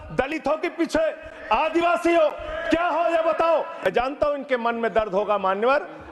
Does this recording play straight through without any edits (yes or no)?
no